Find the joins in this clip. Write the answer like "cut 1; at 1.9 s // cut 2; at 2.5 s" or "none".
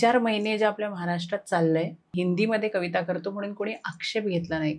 cut 1; at 2.1 s